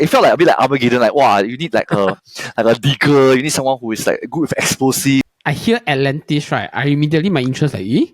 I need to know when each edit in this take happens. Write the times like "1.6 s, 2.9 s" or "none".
5.3 s